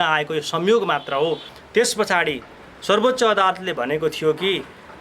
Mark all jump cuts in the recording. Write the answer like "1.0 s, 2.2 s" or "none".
1.5 s